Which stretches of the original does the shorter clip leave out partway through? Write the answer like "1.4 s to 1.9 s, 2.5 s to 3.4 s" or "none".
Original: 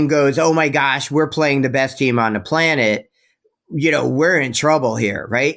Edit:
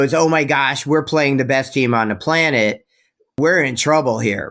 3.6 s to 4.1 s